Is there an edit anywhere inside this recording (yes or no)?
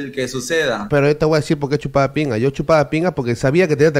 no